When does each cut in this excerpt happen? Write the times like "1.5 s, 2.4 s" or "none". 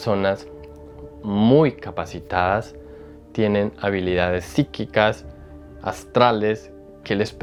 none